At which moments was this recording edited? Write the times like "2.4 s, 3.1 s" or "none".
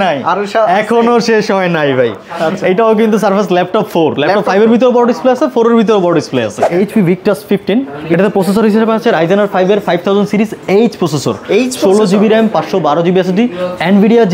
6.6 s

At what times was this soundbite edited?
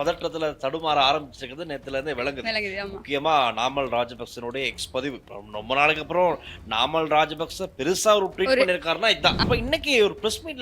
5.2 s, 9.4 s

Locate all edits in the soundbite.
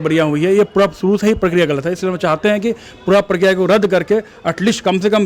none

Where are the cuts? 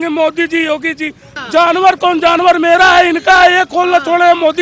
1.2 s

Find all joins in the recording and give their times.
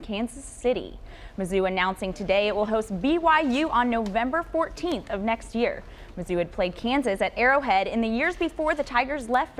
none

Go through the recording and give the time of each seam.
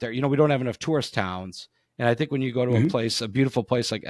none

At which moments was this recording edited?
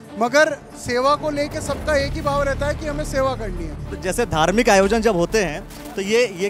3.9 s

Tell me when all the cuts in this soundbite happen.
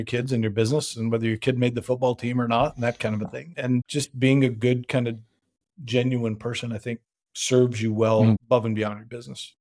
3.8 s, 8.4 s

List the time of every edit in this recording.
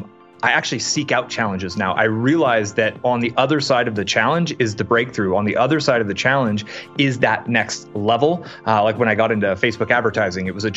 none

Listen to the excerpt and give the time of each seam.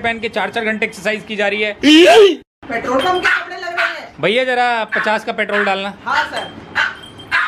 6.0 s

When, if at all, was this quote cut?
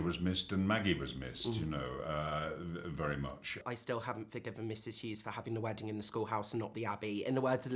3.6 s

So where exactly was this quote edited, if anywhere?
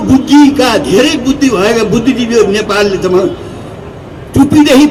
none

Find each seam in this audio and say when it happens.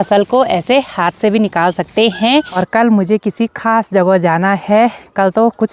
2.6 s

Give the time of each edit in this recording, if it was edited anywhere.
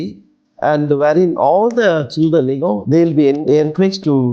3.4 s

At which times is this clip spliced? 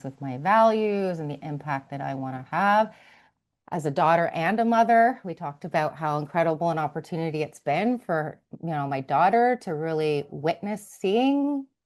none

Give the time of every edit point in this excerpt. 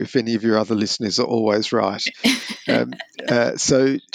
none

